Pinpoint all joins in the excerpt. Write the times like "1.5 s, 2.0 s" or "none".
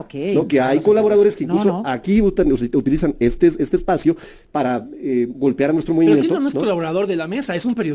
none